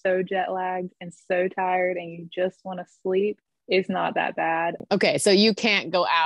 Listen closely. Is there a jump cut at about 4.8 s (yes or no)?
yes